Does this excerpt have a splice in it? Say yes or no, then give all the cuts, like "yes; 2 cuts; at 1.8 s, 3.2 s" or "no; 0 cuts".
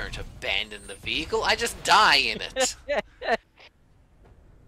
yes; 1 cut; at 3.5 s